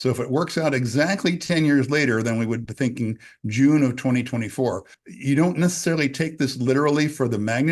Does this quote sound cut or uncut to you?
cut